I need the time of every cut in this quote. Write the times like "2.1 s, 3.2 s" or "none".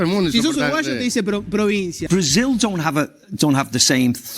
2.0 s